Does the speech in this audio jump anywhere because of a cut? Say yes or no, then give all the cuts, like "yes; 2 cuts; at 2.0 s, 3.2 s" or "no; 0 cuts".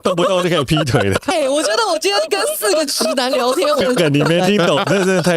yes; 2 cuts; at 1.3 s, 3.8 s